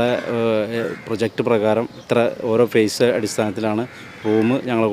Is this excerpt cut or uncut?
uncut